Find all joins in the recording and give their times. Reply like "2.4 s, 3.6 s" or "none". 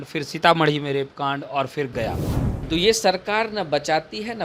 2.5 s

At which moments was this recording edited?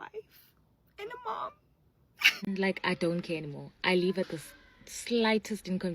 2.3 s

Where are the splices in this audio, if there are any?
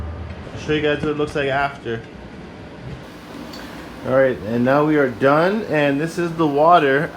3.0 s

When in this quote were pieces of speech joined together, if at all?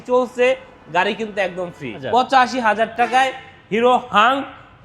2.0 s

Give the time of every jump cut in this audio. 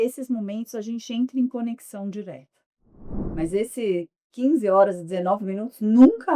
3.2 s

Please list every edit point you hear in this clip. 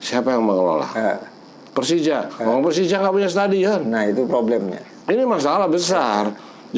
none

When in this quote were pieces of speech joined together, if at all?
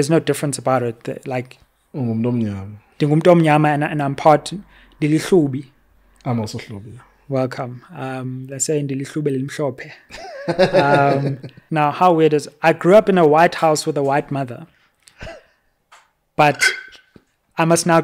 11.5 s

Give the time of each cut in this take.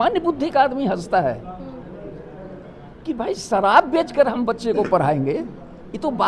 none

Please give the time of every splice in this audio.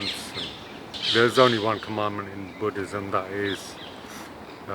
1.0 s

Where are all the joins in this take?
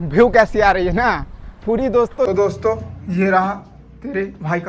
2.3 s

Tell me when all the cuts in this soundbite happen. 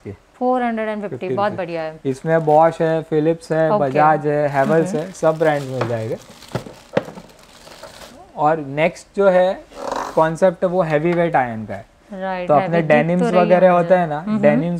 none

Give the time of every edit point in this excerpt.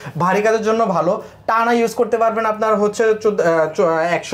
none

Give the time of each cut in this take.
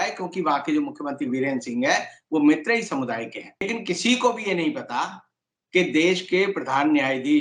3.7 s

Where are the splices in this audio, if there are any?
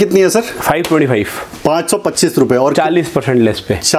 none

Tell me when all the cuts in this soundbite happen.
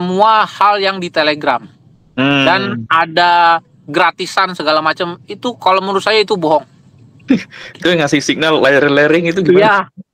none

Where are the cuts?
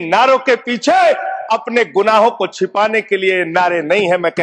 none

